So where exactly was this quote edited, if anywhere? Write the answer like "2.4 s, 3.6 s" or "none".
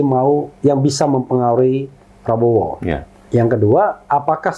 3.1 s